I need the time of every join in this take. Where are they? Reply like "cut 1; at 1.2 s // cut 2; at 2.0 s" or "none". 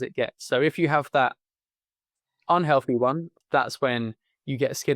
cut 1; at 3.3 s